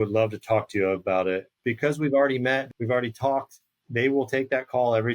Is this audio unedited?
no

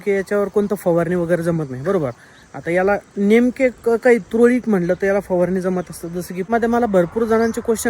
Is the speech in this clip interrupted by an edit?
yes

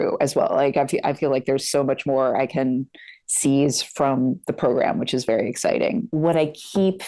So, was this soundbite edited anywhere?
no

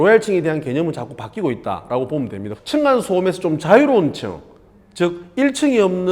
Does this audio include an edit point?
yes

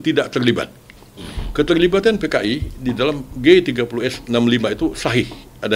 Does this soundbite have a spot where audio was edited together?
no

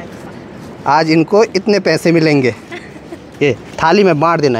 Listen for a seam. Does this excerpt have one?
no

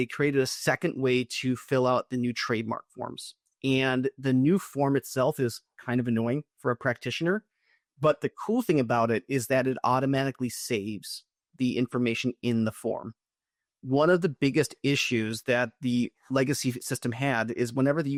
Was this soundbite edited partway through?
no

